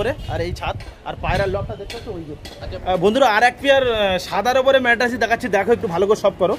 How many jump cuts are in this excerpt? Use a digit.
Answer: 1